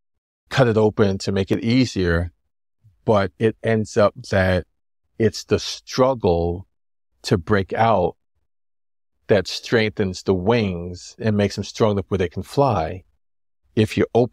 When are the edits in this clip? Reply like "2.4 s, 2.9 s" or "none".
none